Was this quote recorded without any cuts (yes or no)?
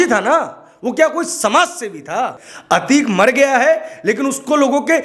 no